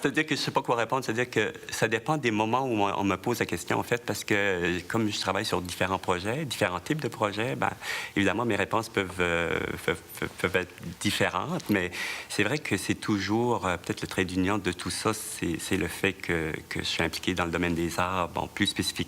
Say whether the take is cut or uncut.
cut